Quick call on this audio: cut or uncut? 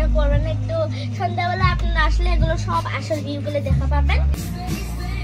cut